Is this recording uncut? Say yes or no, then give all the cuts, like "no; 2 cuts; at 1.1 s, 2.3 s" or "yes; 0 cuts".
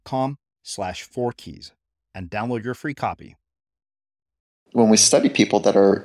no; 1 cut; at 4.8 s